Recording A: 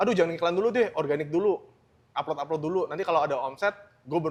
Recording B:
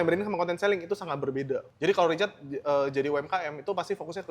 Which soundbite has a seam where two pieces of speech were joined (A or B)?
B